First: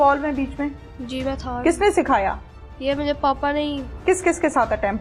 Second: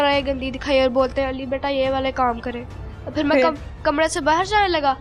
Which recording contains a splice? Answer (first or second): first